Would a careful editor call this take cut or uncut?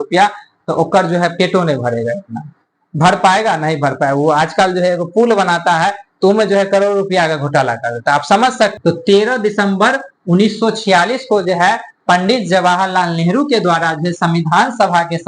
cut